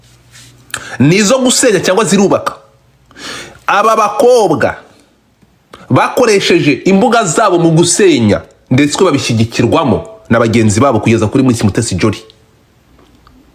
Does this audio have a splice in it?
no; 0 cuts

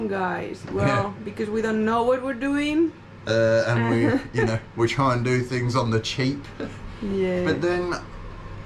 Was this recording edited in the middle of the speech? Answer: no; 0 cuts

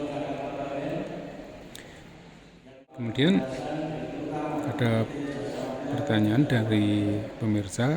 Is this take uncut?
no; 1 cut; at 2.9 s

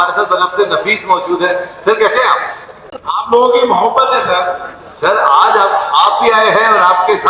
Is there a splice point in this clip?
no; 0 cuts

